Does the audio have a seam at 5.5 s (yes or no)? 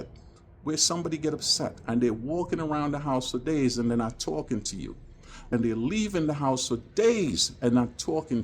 yes